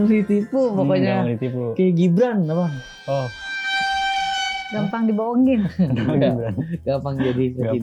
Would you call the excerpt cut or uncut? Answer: uncut